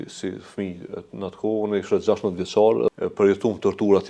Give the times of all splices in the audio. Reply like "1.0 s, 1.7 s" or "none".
2.9 s